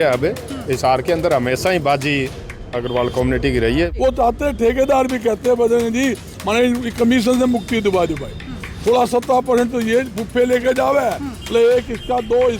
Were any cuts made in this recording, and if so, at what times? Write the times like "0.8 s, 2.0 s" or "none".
3.9 s